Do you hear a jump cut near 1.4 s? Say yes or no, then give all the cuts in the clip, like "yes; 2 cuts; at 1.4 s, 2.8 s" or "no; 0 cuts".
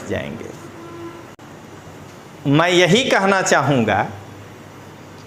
yes; 1 cut; at 1.4 s